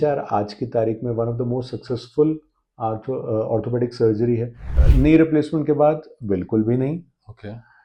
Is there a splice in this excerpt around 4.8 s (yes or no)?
yes